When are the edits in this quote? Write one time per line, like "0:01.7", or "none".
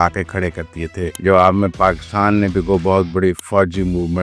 0:01.2
0:03.4